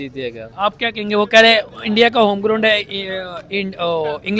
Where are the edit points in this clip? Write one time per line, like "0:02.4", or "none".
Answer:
none